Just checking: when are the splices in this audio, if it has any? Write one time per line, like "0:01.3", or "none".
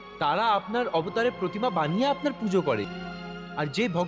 0:02.9